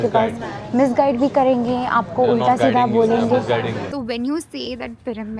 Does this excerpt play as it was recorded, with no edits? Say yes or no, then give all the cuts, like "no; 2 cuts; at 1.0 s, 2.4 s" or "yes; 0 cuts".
no; 1 cut; at 3.9 s